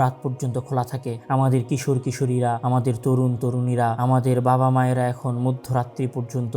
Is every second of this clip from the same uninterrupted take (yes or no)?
no